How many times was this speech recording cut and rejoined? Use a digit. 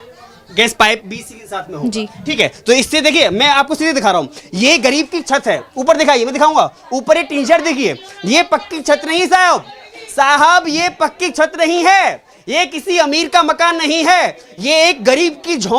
0